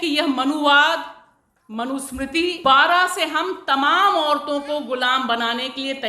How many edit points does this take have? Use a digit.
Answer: 1